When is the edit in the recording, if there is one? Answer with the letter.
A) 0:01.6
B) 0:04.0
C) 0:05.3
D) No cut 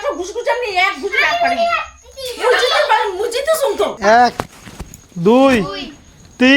B